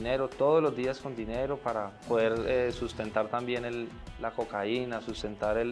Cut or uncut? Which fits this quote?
uncut